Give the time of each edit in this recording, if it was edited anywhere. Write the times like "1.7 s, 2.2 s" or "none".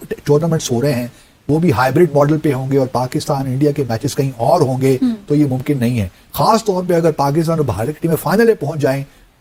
none